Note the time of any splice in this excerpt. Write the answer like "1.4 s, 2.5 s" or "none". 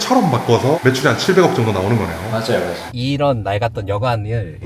0.8 s, 2.9 s